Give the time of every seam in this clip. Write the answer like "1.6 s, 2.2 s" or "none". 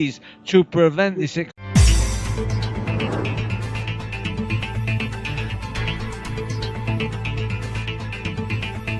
none